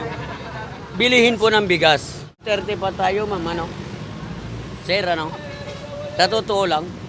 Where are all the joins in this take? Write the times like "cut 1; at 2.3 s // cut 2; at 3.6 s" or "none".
cut 1; at 2.4 s

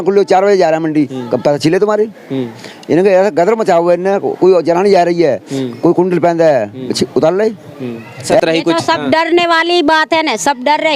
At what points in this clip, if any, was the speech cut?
cut 1; at 8.4 s

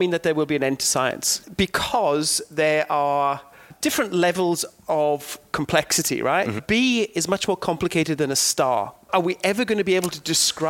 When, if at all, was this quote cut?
cut 1; at 1.4 s // cut 2; at 3.7 s // cut 3; at 6.6 s // cut 4; at 9.1 s

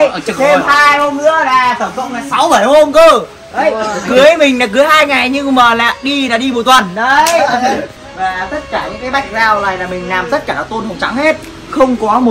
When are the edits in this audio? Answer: cut 1; at 8.0 s

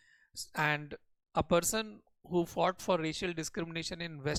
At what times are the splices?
none

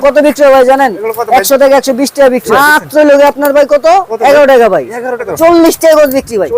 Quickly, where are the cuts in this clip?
cut 1; at 2.5 s // cut 2; at 5.2 s

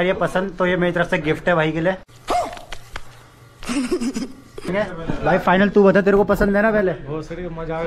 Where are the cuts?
cut 1; at 2.1 s // cut 2; at 4.7 s

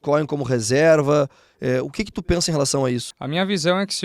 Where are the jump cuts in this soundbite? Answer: cut 1; at 3.1 s

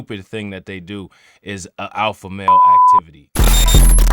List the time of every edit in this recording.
cut 1; at 2.5 s

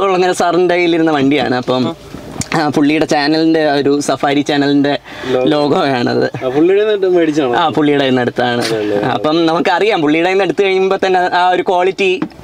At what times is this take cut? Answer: none

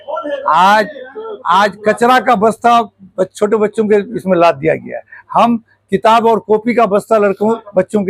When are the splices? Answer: none

